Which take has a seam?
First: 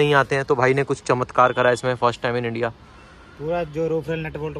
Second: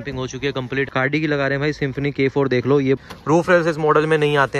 second; 2 cuts; at 0.9 s, 3.0 s

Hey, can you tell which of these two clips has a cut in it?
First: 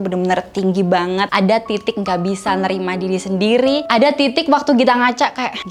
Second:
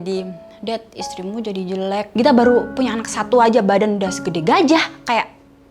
second; 1 cut; at 2.1 s

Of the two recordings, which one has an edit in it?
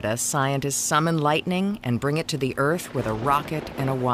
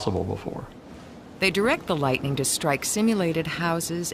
first; 1 cut; at 2.4 s

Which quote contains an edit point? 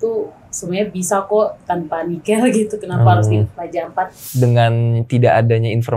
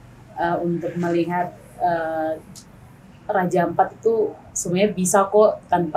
first; 1 cut; at 4.2 s

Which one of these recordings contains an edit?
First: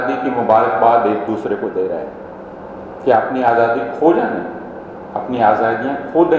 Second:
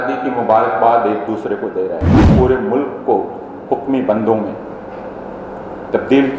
second; 1 cut; at 2.2 s

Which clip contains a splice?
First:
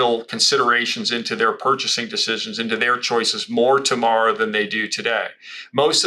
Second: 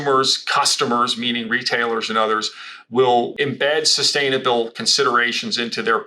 second; 1 cut; at 3.3 s

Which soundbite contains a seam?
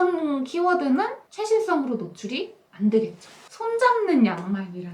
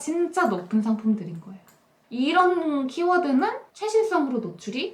first; 1 cut; at 3.4 s

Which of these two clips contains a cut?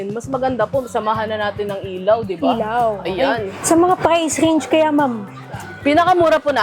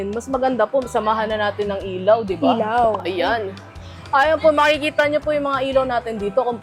first; 1 cut; at 3.5 s

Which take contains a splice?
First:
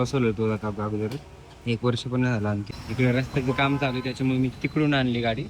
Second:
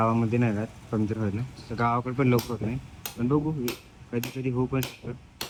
first; 1 cut; at 2.6 s

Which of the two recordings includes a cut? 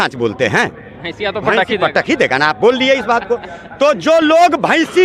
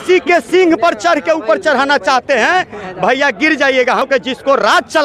second; 1 cut; at 4.1 s

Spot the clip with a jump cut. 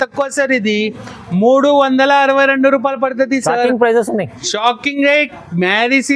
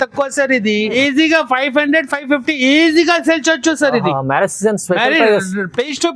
second; 1 cut; at 1.0 s

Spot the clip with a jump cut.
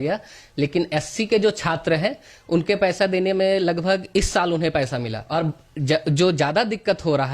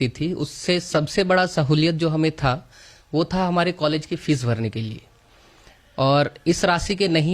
first; 1 cut; at 5.2 s

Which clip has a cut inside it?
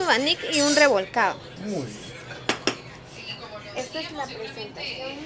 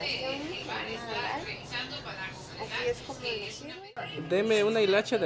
second; 1 cut; at 3.8 s

